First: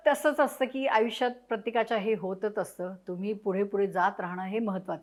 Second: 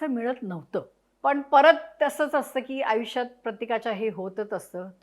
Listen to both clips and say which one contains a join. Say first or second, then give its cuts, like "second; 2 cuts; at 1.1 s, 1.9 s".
second; 1 cut; at 1.0 s